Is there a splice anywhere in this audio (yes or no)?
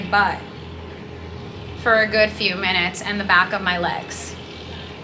no